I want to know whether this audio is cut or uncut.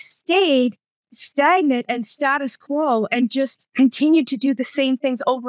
uncut